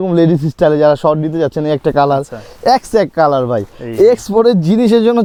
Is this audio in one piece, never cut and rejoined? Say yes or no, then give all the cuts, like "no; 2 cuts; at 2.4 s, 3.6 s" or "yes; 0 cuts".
yes; 0 cuts